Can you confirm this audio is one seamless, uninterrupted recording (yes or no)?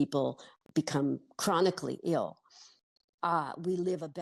yes